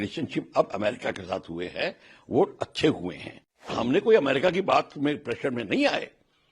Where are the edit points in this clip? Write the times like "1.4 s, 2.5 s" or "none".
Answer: 3.7 s